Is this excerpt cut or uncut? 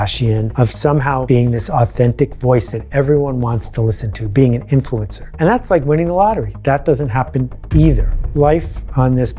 cut